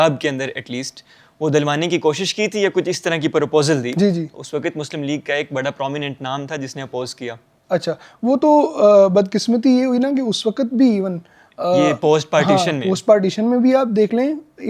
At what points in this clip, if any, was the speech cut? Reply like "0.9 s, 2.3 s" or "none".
none